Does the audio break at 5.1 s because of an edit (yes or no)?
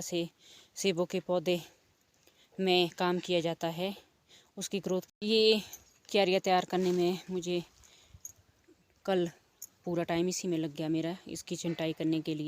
yes